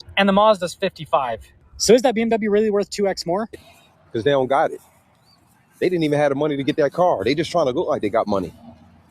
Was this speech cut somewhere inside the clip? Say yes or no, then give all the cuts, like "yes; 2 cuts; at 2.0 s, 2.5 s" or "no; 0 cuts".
yes; 1 cut; at 3.6 s